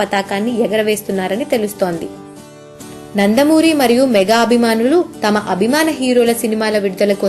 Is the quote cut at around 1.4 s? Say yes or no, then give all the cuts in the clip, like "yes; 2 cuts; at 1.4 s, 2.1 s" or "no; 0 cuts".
yes; 1 cut; at 1.4 s